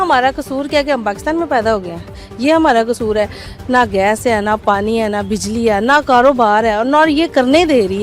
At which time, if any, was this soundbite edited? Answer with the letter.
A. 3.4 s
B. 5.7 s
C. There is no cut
A